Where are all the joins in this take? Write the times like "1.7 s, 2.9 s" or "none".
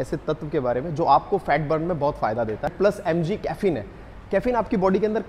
2.7 s